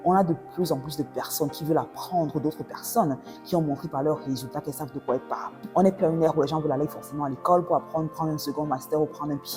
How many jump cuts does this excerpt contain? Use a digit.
1